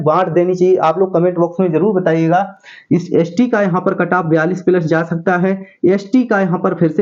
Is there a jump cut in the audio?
no; 0 cuts

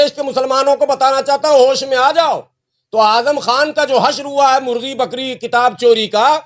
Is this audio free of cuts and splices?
yes; 0 cuts

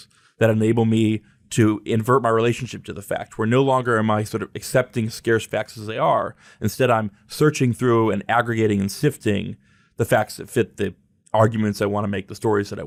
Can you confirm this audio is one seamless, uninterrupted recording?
yes; 0 cuts

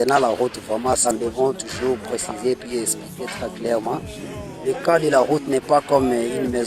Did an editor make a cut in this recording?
yes; 1 cut; at 1.1 s

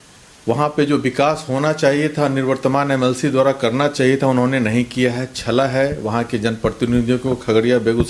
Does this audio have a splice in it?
no; 0 cuts

